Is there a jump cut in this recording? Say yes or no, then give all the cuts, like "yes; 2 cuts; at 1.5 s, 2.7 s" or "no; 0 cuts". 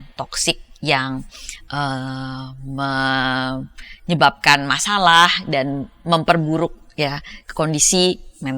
no; 0 cuts